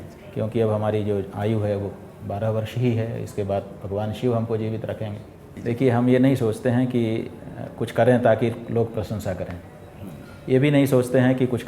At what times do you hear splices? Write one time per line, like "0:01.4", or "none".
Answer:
0:05.5